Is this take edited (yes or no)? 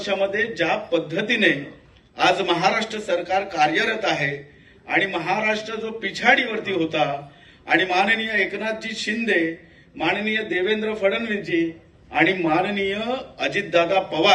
no